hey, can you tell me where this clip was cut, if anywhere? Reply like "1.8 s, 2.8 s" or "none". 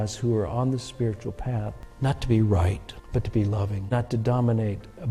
1.8 s, 2.9 s, 3.8 s